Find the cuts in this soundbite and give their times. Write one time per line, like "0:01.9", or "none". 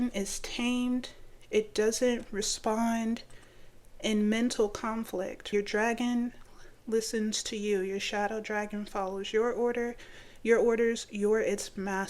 0:05.4